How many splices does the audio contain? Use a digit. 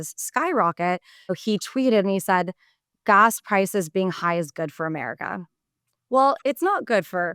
2